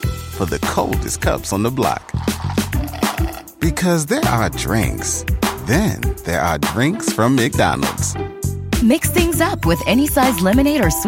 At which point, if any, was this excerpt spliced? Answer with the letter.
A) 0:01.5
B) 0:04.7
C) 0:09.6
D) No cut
D